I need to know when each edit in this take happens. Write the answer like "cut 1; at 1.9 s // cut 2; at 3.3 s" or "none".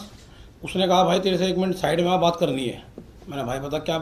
none

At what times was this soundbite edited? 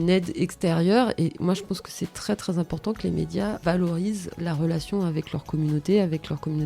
cut 1; at 3.6 s

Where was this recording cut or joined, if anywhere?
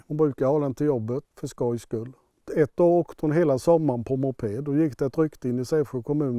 cut 1; at 1.2 s // cut 2; at 2.4 s

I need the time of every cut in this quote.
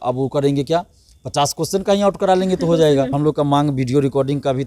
cut 1; at 3.1 s

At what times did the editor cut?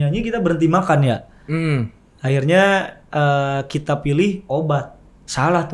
none

